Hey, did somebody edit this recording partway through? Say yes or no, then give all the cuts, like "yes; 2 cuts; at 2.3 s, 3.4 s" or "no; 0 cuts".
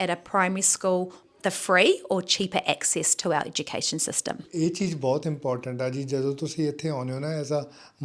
yes; 2 cuts; at 1.2 s, 4.4 s